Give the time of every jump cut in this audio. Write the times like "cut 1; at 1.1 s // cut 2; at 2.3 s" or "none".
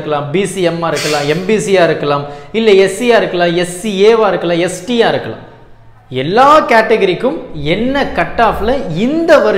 none